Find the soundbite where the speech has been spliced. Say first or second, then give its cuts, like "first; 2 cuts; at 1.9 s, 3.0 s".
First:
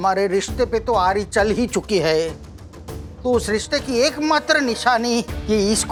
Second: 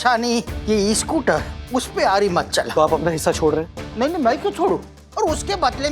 second; 2 cuts; at 2.7 s, 5.0 s